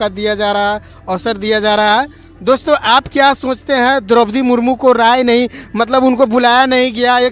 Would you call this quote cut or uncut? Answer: uncut